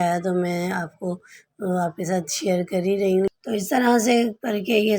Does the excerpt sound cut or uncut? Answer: cut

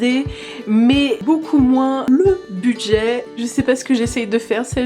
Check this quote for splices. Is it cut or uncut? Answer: cut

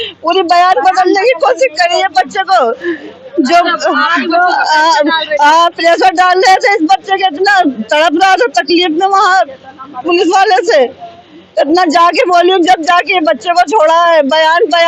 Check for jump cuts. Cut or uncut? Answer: uncut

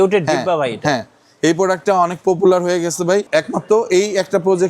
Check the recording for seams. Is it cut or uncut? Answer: cut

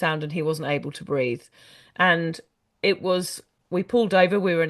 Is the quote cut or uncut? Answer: uncut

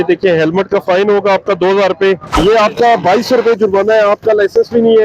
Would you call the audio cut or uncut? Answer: cut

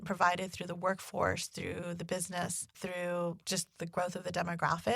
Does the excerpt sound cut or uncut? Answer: cut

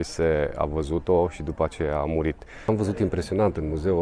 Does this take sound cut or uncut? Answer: cut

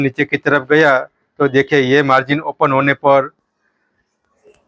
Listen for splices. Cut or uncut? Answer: uncut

